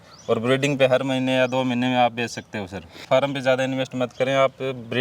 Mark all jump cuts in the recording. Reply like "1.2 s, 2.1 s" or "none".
3.0 s